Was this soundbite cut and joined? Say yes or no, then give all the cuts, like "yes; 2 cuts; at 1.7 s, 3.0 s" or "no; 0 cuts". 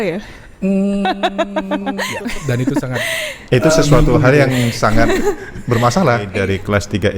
yes; 2 cuts; at 2.1 s, 6.3 s